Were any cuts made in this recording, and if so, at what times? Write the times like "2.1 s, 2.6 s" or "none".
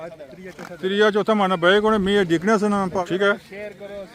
3.0 s